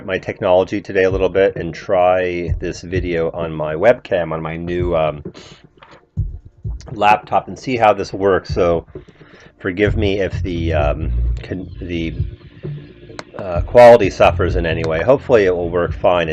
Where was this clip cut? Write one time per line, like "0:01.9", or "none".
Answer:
none